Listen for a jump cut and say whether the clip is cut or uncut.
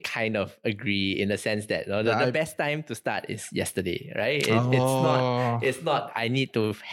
uncut